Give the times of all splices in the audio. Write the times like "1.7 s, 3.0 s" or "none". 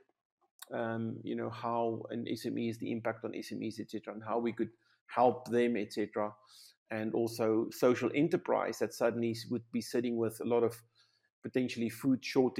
none